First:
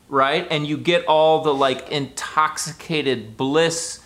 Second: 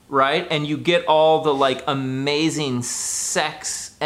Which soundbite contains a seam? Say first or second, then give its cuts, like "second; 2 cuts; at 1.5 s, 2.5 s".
first; 1 cut; at 1.8 s